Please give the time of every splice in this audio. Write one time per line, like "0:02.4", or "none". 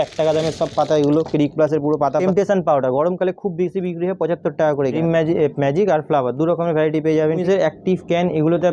0:02.2
0:05.0
0:07.4